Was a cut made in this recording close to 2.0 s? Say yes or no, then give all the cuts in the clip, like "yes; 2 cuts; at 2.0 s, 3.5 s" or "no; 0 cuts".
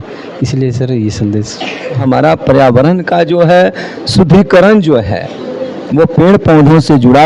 yes; 1 cut; at 2.0 s